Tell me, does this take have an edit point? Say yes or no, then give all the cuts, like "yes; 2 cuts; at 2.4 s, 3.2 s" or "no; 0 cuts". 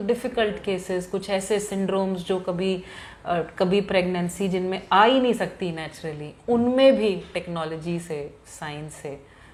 no; 0 cuts